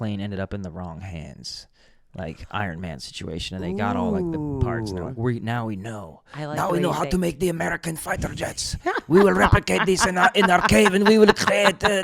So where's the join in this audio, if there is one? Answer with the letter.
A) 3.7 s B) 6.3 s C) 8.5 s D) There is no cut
D